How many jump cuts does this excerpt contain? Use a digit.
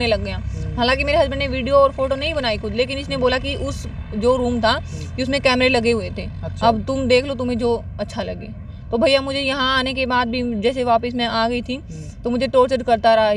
0